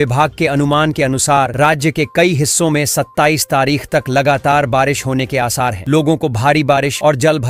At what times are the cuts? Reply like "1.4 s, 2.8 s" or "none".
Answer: none